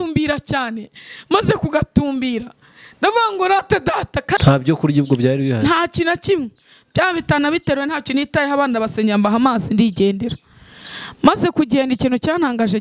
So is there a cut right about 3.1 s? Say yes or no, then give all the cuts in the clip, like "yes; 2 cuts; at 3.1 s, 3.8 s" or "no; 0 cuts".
no; 1 cut; at 4.4 s